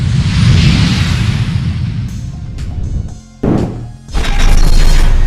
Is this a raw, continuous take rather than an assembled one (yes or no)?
no